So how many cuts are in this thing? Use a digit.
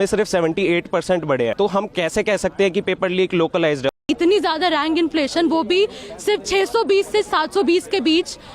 2